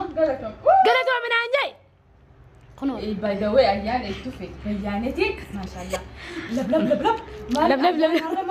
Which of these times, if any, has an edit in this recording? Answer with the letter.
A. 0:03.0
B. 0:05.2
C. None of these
A